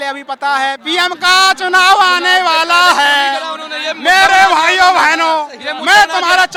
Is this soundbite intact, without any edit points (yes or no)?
yes